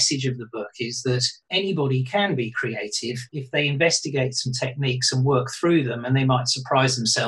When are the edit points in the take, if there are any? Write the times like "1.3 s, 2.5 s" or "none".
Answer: 3.3 s

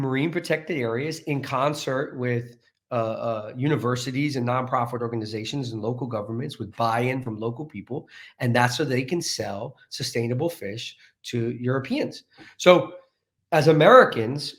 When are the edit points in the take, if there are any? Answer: none

